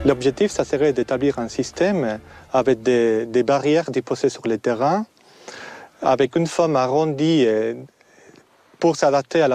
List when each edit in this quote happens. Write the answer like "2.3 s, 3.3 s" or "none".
none